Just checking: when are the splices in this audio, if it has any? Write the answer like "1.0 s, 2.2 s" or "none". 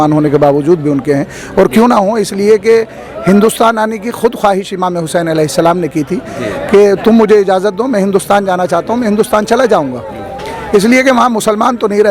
none